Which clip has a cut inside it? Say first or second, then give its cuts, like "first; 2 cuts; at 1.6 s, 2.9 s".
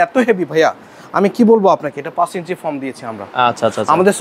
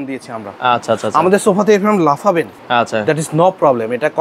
second; 1 cut; at 2.6 s